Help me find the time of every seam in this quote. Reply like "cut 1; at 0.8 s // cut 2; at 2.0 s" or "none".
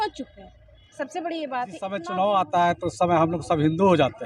cut 1; at 2.0 s